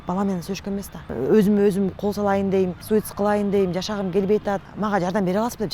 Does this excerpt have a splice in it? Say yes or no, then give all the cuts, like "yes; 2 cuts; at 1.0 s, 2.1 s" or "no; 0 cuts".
yes; 3 cuts; at 1.1 s, 2.8 s, 4.7 s